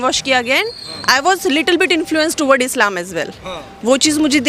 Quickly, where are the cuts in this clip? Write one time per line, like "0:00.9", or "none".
none